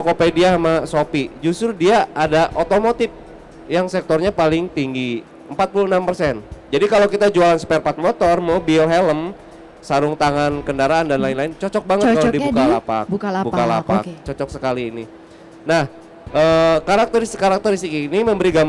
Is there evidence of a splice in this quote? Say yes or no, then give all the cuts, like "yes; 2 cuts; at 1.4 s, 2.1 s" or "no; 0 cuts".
no; 0 cuts